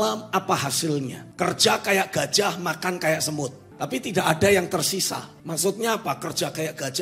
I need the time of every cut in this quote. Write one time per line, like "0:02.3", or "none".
0:01.2
0:03.6
0:05.3